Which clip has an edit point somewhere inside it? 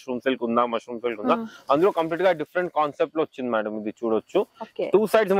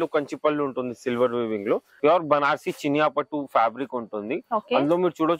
second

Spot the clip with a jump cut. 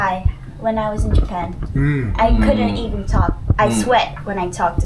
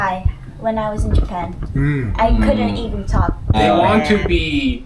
second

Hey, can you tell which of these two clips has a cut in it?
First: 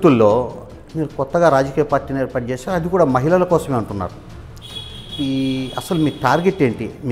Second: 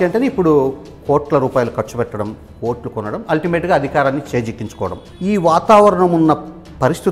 second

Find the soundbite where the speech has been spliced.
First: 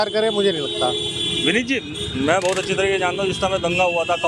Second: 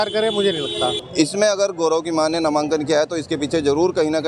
second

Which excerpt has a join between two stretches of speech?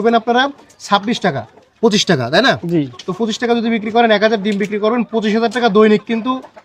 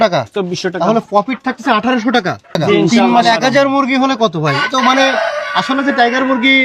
second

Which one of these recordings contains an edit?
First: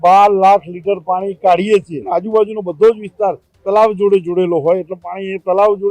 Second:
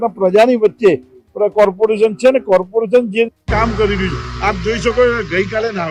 first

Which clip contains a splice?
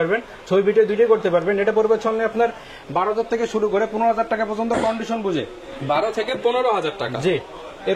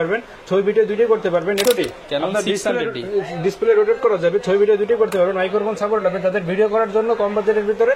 second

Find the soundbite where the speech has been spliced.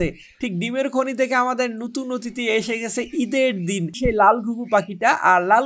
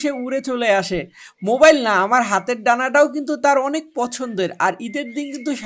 first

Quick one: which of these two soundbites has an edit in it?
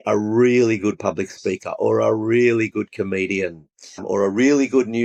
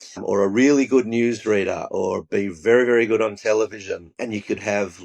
second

